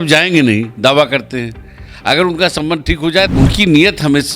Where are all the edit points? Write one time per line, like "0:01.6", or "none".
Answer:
0:03.3